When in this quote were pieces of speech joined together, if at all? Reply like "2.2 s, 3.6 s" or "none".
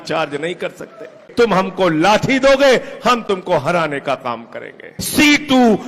1.2 s, 5.0 s